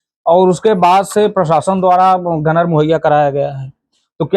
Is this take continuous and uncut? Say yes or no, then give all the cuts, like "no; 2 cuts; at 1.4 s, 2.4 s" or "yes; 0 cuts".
yes; 0 cuts